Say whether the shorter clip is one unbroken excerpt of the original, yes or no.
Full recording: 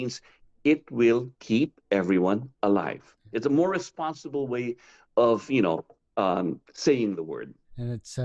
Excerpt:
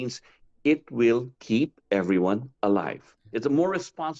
yes